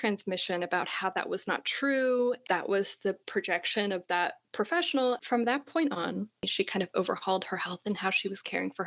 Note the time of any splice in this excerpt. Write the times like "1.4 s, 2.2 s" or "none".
2.4 s, 5.2 s, 6.5 s

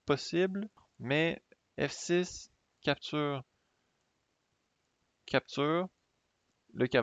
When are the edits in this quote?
0.9 s

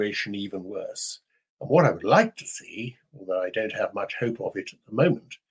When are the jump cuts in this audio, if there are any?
none

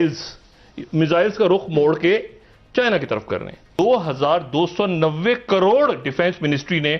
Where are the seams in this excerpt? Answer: 3.8 s

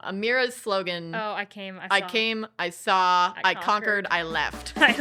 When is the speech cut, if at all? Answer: none

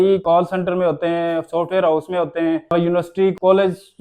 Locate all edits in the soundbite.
none

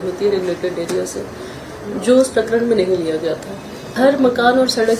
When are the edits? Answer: 3.8 s

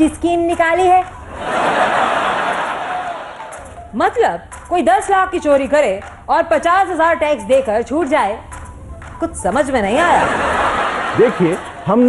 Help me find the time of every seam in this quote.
none

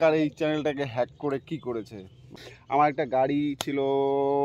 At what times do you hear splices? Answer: 2.4 s

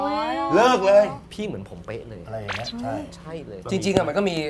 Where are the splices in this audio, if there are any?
1.3 s, 3.6 s

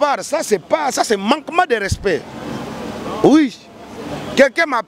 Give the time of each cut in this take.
none

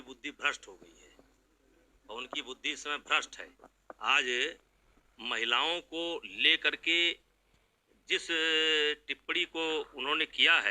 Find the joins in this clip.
none

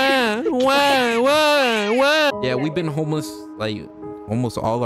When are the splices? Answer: 2.3 s

